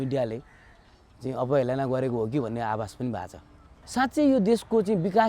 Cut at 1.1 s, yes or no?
no